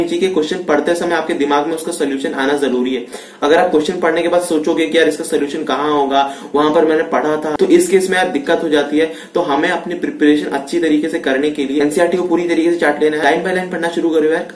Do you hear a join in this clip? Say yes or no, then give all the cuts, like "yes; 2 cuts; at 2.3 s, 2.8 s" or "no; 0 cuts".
no; 0 cuts